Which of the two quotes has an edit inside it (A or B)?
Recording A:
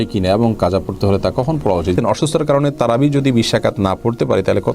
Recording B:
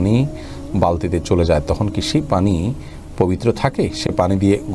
A